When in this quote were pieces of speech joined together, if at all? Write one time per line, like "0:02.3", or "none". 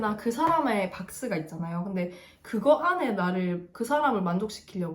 0:03.7